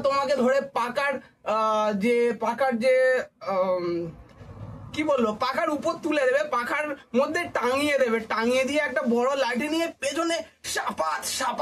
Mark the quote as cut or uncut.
uncut